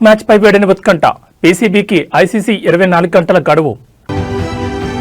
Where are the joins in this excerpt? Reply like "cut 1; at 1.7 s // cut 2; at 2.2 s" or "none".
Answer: cut 1; at 4.1 s